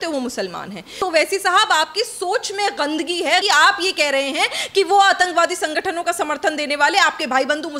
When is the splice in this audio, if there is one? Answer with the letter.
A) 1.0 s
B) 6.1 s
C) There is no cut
A